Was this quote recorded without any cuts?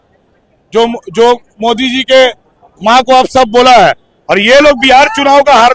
yes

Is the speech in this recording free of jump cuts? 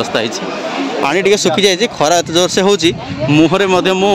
no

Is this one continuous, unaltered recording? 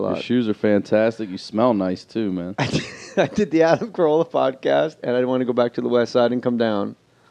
no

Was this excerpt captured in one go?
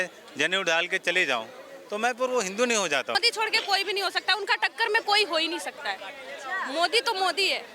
no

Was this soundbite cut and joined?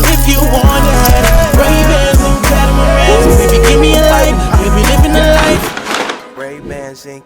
no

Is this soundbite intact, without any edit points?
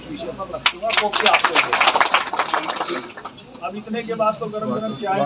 yes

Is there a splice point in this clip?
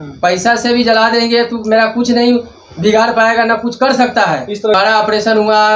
yes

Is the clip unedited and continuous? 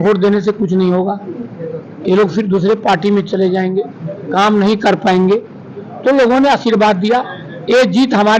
yes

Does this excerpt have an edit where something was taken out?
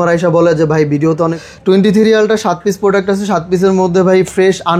yes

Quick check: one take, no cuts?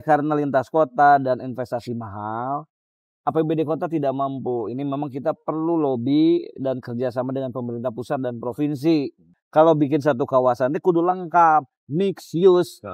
no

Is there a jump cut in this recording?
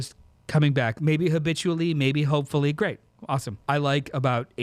yes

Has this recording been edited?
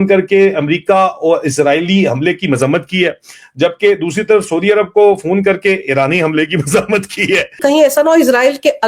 yes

